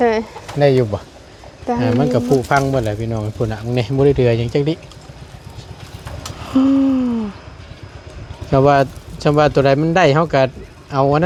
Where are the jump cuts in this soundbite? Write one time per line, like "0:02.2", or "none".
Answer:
none

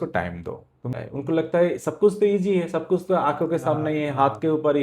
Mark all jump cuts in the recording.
0:00.9

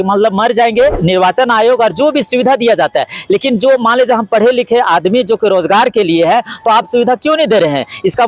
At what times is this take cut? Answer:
0:01.0

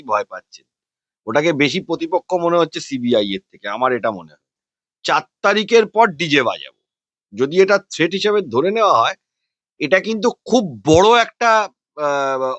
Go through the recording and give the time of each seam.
0:04.6

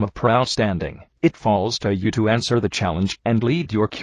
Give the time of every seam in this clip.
none

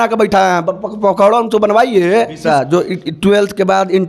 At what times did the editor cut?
0:02.4

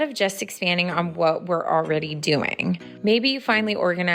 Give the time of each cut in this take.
0:02.9

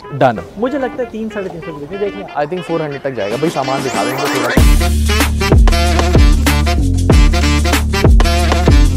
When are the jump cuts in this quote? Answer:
0:04.5

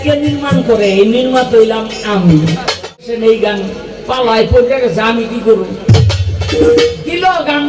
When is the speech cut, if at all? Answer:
0:03.1

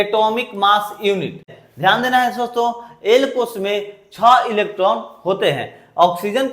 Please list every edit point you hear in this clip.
0:01.5

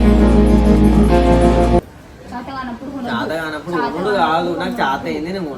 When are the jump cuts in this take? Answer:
0:01.8

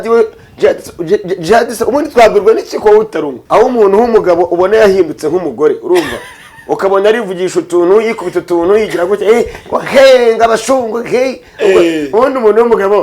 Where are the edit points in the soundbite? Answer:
0:03.4

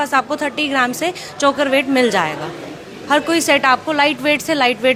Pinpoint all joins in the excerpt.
none

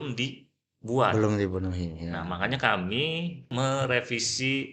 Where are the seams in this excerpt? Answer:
0:03.5

